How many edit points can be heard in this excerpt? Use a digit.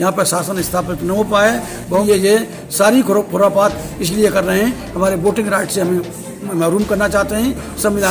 1